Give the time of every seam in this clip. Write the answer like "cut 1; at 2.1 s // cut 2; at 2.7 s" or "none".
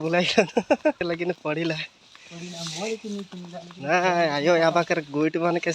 cut 1; at 1.0 s